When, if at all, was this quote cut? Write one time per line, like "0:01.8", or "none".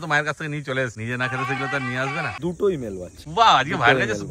0:01.0
0:02.3
0:03.2